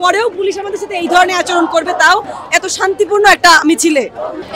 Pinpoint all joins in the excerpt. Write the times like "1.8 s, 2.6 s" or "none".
none